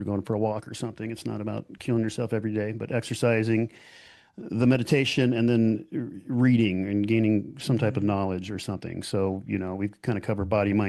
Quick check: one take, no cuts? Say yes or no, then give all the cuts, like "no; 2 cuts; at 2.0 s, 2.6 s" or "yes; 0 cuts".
yes; 0 cuts